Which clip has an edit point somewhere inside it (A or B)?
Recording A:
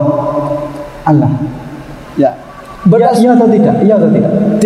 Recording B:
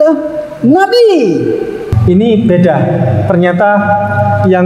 B